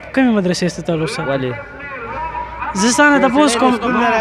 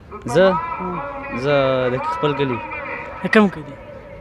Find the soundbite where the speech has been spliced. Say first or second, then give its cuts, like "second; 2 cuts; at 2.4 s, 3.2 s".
first; 1 cut; at 2.0 s